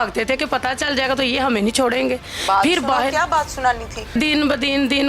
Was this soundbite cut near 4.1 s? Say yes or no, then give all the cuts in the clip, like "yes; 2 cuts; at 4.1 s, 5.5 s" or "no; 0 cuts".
yes; 1 cut; at 4.1 s